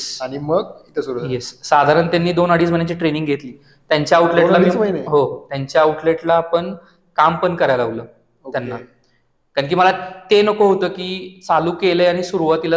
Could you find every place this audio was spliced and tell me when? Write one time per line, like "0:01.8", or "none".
none